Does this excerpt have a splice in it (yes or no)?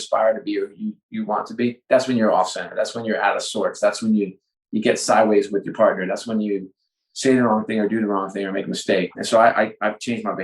yes